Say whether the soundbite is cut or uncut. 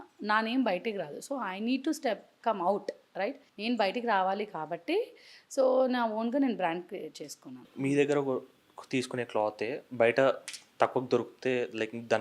cut